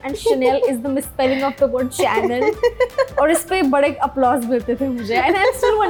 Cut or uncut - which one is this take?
uncut